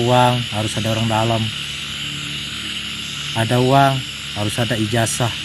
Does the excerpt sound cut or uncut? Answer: uncut